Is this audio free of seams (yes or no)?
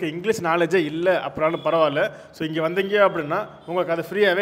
yes